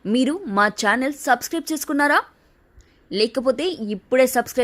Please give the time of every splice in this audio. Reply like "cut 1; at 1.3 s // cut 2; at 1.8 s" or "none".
none